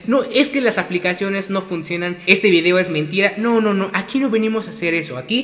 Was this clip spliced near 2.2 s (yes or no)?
yes